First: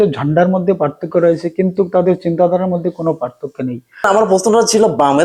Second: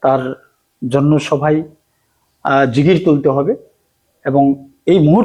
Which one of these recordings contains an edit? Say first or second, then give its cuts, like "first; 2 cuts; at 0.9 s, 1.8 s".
first; 1 cut; at 4.1 s